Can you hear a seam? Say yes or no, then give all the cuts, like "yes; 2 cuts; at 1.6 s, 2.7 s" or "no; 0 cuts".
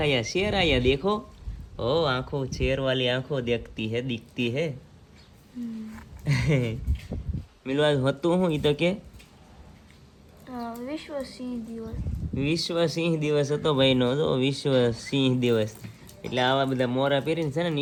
no; 0 cuts